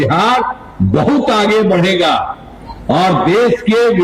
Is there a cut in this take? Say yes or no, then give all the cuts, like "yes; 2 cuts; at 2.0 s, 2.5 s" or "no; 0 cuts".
no; 0 cuts